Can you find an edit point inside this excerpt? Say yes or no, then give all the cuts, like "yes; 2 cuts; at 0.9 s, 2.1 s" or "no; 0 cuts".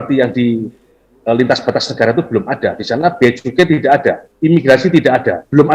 no; 0 cuts